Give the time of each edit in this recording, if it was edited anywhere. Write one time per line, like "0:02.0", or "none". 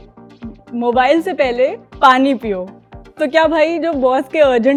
none